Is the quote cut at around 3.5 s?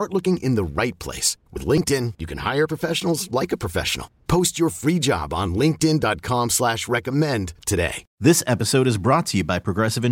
no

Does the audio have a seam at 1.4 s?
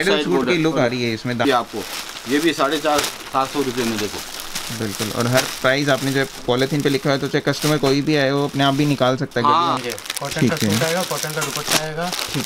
yes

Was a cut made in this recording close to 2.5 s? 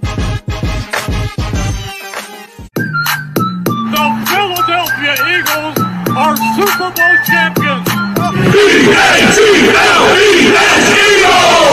yes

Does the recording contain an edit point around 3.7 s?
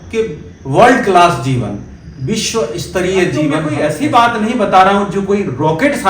yes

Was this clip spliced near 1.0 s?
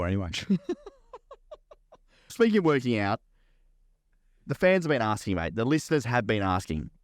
no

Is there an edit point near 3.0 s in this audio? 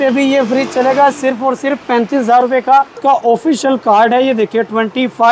yes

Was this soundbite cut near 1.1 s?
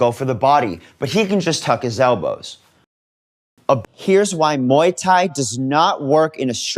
no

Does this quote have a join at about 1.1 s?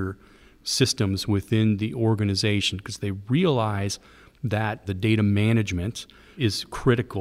no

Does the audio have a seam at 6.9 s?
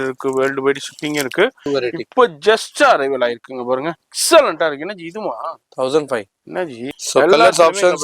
yes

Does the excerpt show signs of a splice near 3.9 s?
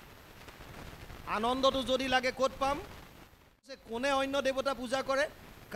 yes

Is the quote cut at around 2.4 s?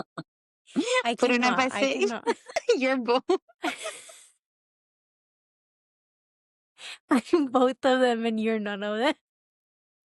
yes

